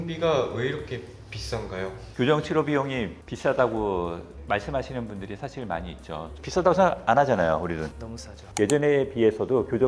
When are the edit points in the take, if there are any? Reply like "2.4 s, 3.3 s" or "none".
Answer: 8.4 s

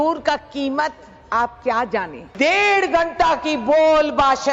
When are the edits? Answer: 2.3 s

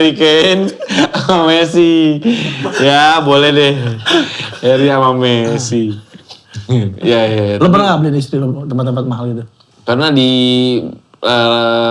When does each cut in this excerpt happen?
none

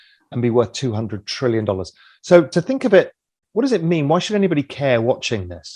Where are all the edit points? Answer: none

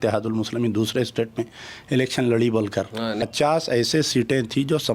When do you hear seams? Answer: 3.2 s

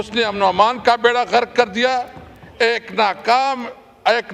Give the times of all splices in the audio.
none

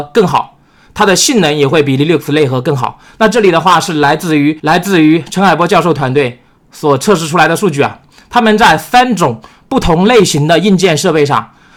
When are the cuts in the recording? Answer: none

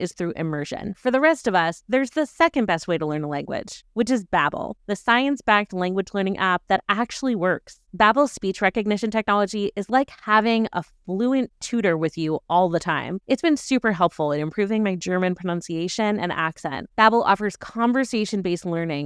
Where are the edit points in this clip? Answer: 0.9 s, 16.9 s

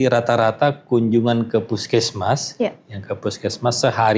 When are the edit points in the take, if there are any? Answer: none

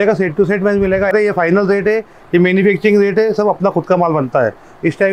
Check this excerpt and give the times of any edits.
1.1 s

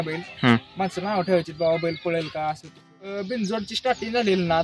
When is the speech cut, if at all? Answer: 3.1 s

